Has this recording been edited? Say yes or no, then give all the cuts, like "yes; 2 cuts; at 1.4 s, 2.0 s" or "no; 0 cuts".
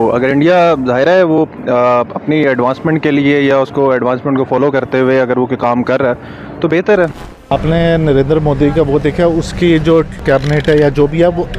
yes; 2 cuts; at 7.3 s, 10.2 s